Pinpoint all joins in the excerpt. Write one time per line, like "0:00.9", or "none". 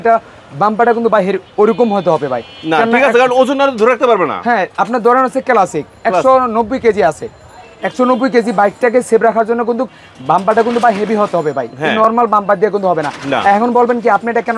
none